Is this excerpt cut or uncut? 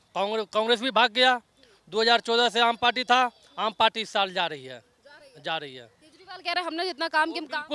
uncut